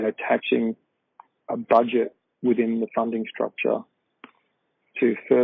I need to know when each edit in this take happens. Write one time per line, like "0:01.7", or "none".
none